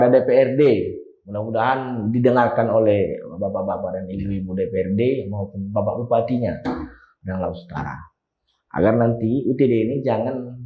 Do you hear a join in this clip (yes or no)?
no